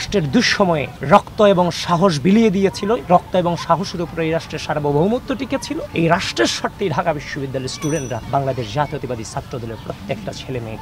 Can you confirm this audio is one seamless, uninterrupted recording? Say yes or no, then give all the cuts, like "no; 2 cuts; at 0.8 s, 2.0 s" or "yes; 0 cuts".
no; 3 cuts; at 0.9 s, 5.9 s, 8.2 s